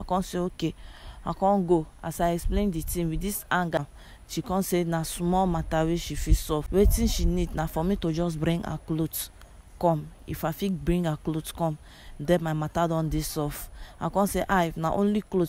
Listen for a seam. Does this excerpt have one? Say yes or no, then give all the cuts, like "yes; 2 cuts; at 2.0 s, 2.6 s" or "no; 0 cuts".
yes; 2 cuts; at 3.8 s, 6.7 s